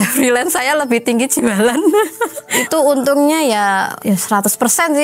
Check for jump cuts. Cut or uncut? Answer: uncut